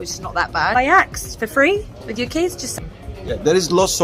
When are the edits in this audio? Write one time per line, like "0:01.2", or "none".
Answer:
0:00.8
0:02.7